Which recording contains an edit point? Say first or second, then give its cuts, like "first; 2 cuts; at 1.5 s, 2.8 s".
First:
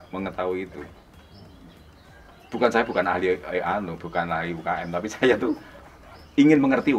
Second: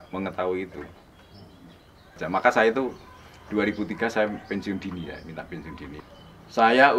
second; 2 cuts; at 2.2 s, 6.0 s